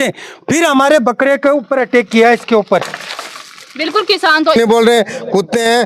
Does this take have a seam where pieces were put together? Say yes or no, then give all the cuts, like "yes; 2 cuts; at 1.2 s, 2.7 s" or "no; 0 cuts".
yes; 1 cut; at 4.6 s